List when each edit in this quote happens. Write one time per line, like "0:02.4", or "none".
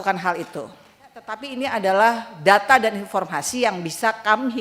0:01.4